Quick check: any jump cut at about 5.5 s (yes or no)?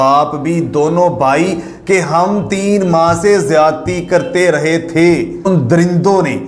yes